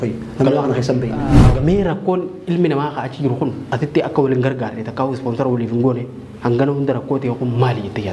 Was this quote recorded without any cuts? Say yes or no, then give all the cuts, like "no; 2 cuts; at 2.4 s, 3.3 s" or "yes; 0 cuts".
no; 1 cut; at 1.4 s